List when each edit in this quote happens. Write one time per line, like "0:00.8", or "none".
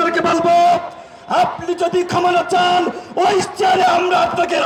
none